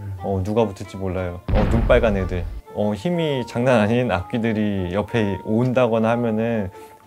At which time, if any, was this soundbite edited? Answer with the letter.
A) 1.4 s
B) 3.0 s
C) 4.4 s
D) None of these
A